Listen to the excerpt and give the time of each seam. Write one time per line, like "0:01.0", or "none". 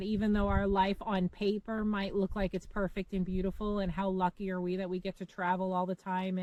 none